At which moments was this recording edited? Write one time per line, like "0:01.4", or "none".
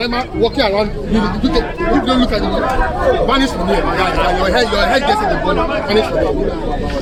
none